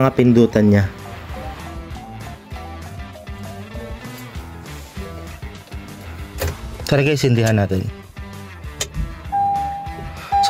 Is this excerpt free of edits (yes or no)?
yes